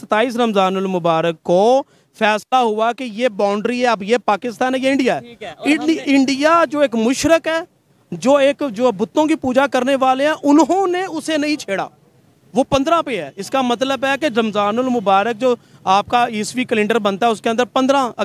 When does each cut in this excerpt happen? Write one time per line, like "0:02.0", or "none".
none